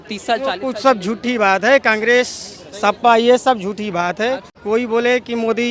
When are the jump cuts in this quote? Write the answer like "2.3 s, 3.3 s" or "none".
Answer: 4.5 s